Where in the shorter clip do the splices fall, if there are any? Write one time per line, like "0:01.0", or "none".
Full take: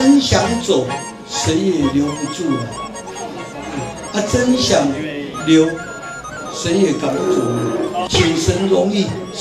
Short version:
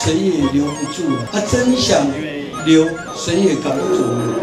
0:01.3
0:03.1